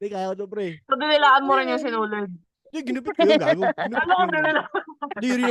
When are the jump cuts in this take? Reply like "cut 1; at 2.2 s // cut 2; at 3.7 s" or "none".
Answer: none

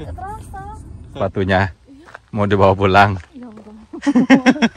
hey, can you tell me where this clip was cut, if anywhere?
cut 1; at 1.2 s

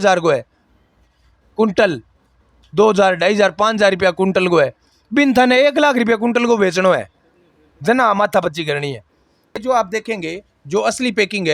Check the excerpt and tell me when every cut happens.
cut 1; at 9.6 s

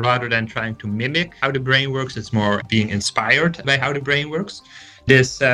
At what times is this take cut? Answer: cut 1; at 1.4 s // cut 2; at 2.6 s // cut 3; at 3.6 s

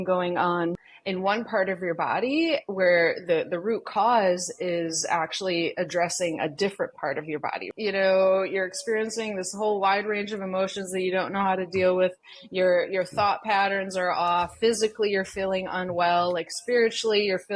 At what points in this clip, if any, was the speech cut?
cut 1; at 0.9 s // cut 2; at 7.6 s

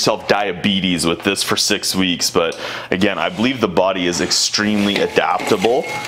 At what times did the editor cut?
none

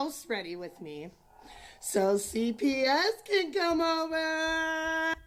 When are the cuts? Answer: none

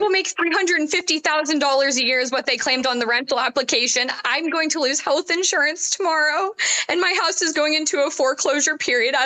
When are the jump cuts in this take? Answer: none

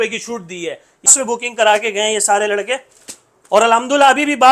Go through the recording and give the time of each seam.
cut 1; at 1.1 s

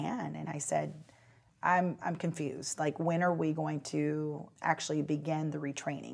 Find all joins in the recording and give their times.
cut 1; at 4.5 s

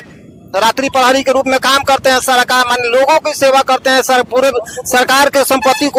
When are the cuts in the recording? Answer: none

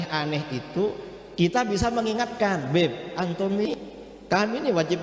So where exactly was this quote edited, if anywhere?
cut 1; at 3.7 s

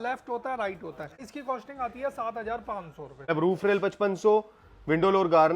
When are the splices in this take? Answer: cut 1; at 1.3 s // cut 2; at 3.3 s

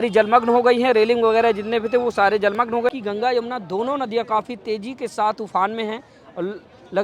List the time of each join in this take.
cut 1; at 2.9 s

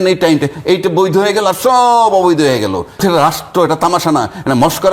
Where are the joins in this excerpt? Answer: cut 1; at 3.0 s

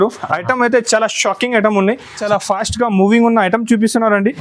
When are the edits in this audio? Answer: cut 1; at 2.2 s

